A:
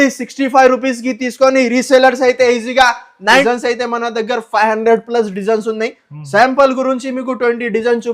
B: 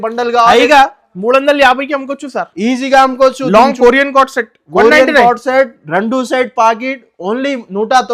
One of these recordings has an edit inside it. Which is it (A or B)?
A